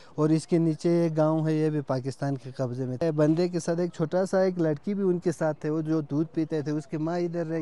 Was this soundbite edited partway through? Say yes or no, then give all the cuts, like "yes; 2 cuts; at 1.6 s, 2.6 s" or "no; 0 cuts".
yes; 1 cut; at 3.0 s